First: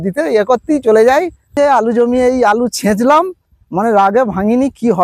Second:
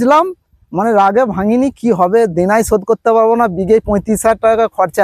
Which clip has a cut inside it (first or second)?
first